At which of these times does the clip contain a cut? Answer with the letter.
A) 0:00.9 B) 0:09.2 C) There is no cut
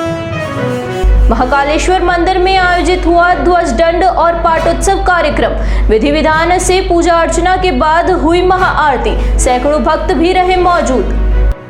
A